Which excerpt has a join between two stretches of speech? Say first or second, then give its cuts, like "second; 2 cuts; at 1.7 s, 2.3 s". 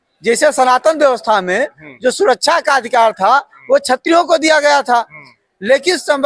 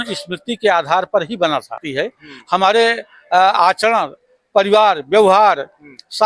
second; 1 cut; at 1.9 s